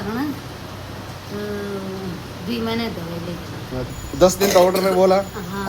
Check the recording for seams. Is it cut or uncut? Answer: cut